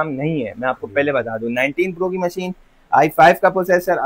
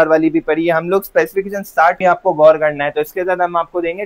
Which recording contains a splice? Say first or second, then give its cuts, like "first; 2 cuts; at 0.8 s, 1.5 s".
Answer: second; 1 cut; at 2.0 s